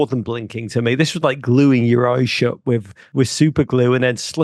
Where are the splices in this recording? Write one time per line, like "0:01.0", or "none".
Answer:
0:03.0